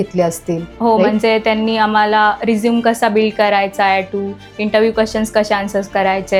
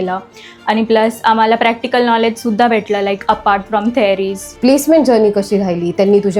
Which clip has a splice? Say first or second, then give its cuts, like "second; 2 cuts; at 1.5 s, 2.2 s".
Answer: second; 1 cut; at 4.4 s